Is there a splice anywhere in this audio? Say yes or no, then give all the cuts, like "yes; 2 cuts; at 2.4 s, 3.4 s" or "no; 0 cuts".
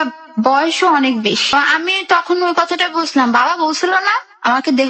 yes; 1 cut; at 1.5 s